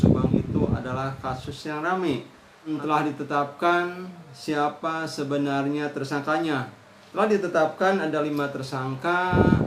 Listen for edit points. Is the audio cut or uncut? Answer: cut